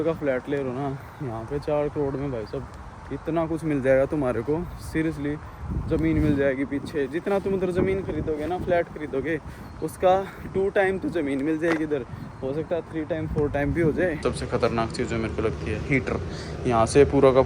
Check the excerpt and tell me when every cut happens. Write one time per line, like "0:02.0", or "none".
0:14.2